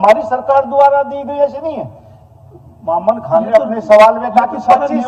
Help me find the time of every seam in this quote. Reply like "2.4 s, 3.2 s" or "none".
none